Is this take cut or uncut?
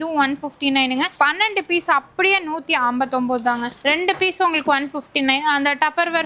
cut